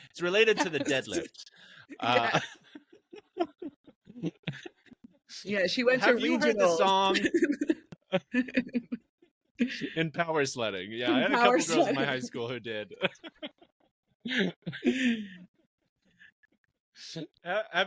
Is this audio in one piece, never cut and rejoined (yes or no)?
yes